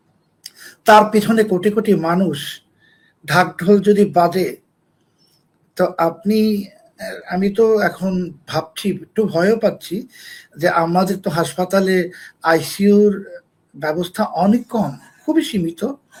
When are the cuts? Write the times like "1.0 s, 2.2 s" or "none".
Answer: none